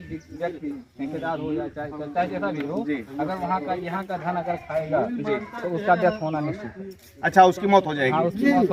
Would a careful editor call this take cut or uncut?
uncut